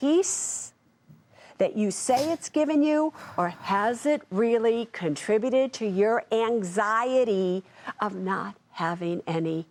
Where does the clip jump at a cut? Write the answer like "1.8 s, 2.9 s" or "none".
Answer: none